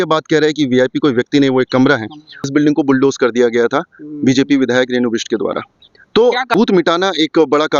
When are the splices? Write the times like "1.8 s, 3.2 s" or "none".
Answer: 2.5 s, 6.5 s

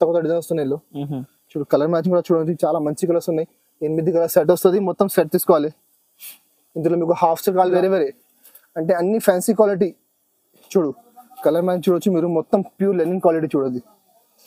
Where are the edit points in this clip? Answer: 7.7 s

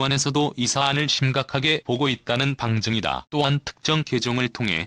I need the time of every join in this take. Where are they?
3.1 s

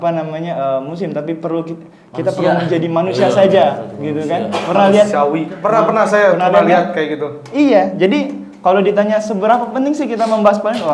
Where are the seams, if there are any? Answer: none

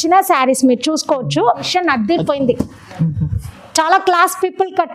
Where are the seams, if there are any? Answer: 1.7 s

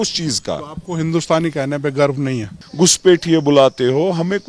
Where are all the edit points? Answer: 2.5 s

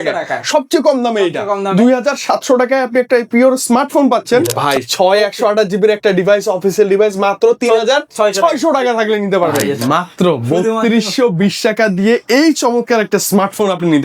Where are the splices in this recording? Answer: 4.5 s, 9.6 s

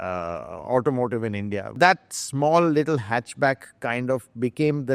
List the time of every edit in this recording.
1.8 s

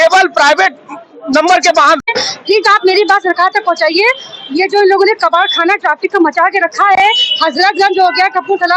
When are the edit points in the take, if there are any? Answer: 2.0 s

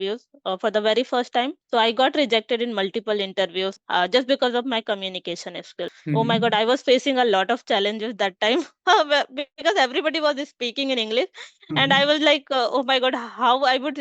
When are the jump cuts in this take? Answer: 1.6 s, 3.8 s, 6.0 s

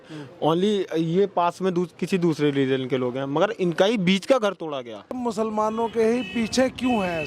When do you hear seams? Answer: 5.2 s

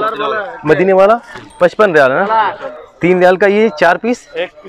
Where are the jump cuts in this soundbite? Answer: 2.6 s

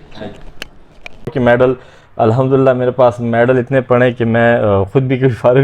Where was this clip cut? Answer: 1.3 s

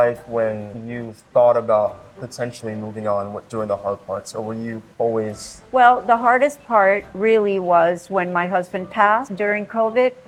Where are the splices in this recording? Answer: none

